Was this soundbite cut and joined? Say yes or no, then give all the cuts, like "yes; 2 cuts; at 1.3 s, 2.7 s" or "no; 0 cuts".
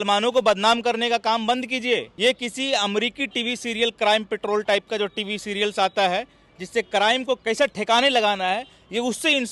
yes; 1 cut; at 2.1 s